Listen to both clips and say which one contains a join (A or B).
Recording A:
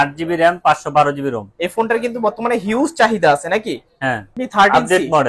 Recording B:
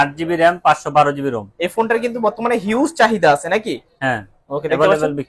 A